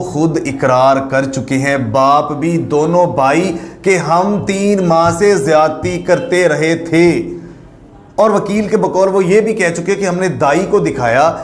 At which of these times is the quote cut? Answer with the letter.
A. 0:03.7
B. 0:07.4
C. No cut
C